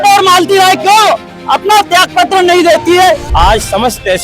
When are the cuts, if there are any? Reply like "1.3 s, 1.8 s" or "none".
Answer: 3.3 s